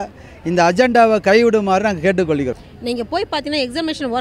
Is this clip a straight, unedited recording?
no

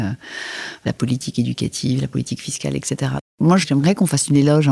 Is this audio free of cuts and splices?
no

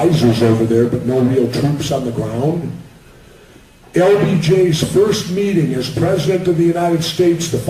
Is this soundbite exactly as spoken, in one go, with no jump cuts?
no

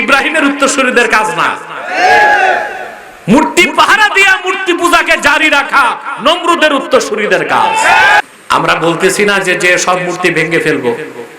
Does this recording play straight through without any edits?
no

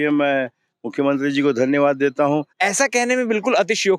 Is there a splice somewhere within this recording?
yes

